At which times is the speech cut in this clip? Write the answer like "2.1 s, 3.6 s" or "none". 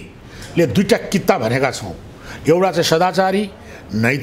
none